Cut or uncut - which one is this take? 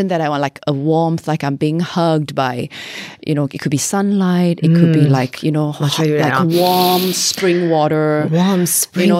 uncut